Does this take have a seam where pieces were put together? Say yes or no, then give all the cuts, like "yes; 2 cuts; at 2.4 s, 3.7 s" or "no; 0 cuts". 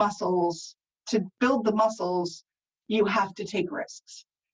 yes; 1 cut; at 1.0 s